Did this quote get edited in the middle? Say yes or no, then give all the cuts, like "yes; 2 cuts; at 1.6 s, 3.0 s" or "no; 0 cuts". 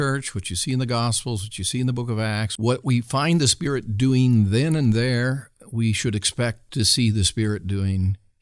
yes; 2 cuts; at 2.5 s, 6.6 s